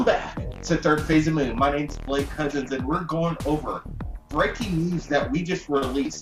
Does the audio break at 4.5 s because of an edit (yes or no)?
no